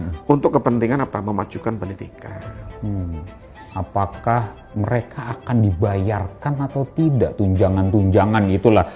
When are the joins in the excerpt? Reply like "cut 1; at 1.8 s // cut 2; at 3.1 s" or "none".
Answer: cut 1; at 3.7 s